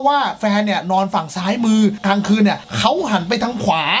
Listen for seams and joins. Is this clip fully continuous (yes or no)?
yes